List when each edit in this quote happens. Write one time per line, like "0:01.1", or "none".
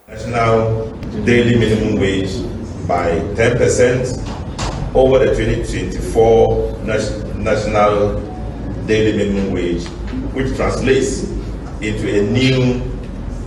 0:01.0